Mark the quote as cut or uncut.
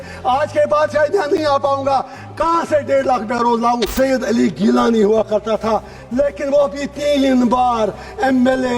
cut